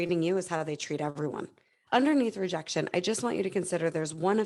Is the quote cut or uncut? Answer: cut